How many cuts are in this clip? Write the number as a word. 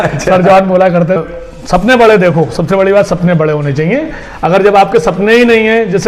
one